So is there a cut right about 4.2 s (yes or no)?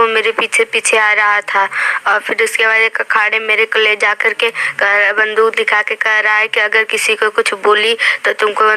no